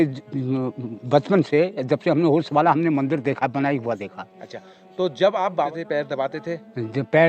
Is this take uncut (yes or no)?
no